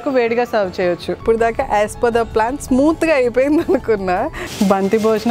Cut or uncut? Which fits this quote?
cut